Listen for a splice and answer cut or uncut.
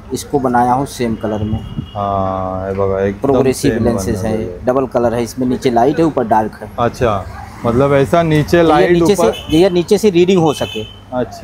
uncut